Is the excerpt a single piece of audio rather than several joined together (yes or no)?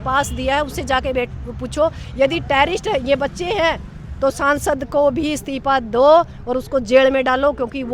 yes